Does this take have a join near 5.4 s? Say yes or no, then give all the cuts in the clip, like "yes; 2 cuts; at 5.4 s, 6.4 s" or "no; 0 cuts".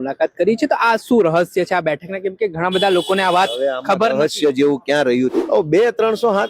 yes; 1 cut; at 5.4 s